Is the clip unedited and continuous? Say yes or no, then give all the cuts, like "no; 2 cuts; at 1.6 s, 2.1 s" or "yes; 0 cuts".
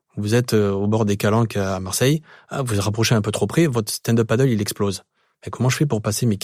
yes; 0 cuts